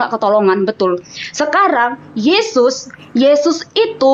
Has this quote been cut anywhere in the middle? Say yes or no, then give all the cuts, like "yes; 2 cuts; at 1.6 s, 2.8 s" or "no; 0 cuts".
no; 0 cuts